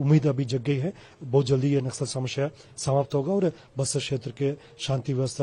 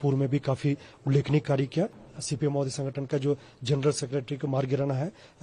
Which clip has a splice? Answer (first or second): second